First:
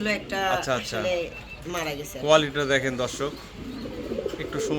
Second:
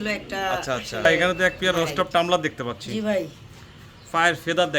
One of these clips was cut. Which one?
second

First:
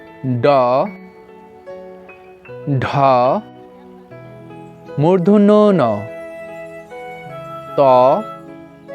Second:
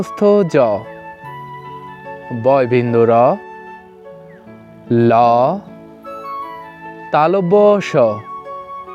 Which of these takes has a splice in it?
first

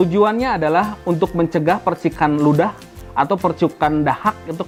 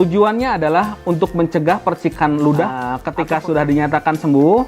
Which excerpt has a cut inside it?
second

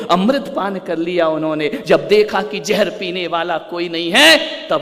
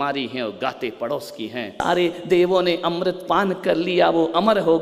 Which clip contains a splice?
second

